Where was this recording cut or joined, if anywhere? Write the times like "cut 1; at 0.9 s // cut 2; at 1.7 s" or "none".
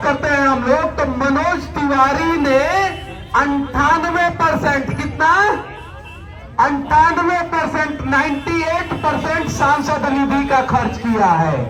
none